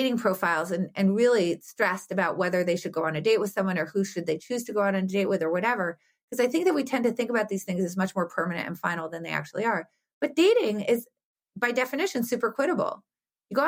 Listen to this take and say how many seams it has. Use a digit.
0